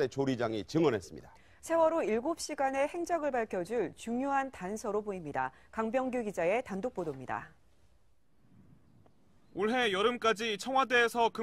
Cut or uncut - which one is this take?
uncut